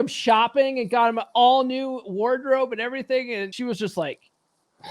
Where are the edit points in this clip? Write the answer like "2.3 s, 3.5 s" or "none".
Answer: 3.5 s